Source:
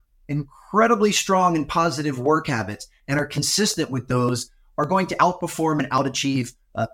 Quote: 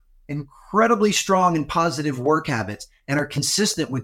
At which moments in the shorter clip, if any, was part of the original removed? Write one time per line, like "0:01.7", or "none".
none